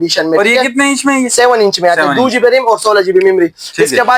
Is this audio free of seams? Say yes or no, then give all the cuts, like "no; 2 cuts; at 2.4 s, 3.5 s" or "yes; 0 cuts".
yes; 0 cuts